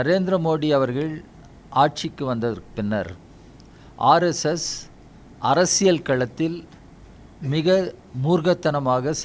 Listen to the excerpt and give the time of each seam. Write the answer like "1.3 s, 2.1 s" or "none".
none

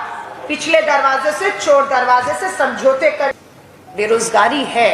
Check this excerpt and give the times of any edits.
3.4 s

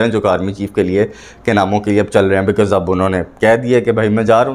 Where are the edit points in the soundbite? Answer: none

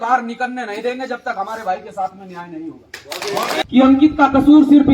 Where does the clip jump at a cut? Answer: 3.6 s

